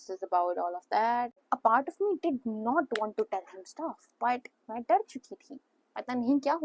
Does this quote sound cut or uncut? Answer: cut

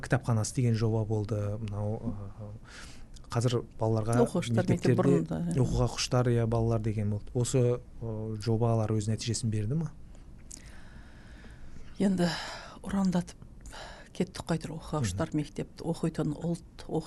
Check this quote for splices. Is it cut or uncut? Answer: uncut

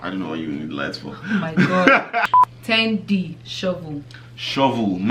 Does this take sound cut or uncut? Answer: cut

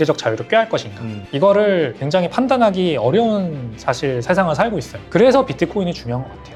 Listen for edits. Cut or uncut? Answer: uncut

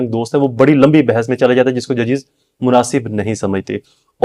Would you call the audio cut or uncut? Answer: uncut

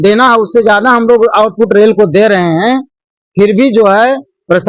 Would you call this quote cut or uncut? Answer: uncut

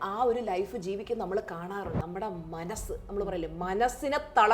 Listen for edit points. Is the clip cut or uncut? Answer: cut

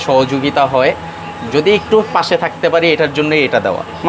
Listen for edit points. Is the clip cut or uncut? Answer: uncut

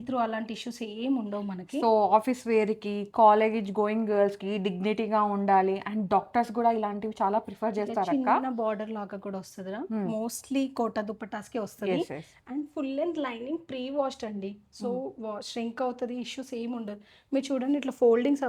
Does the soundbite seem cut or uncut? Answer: uncut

